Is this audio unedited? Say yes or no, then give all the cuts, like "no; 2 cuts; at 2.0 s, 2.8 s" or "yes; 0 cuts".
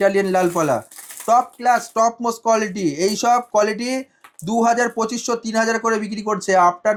yes; 0 cuts